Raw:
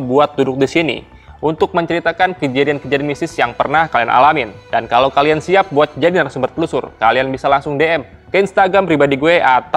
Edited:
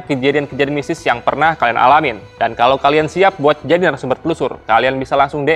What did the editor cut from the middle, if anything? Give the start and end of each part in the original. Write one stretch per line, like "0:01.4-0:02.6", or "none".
none

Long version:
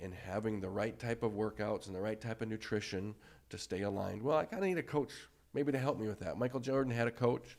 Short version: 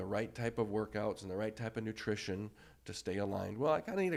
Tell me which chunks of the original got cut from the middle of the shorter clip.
none

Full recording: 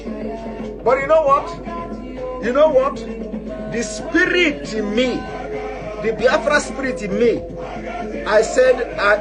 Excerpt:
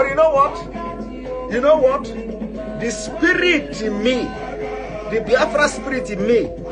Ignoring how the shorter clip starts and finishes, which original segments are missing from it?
none

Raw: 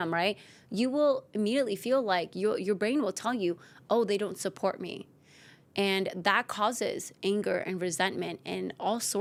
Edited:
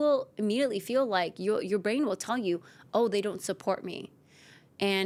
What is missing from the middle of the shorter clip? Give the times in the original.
none

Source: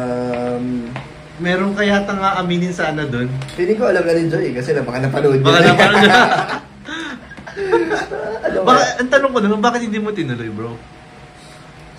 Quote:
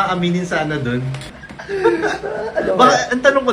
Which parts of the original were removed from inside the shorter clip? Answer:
0:03.4-0:07.0

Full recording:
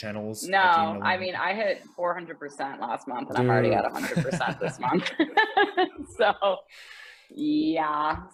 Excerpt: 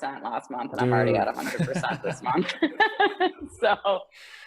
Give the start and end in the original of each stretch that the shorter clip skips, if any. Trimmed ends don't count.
none

